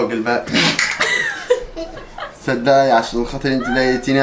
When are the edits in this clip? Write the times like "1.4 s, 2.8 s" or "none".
none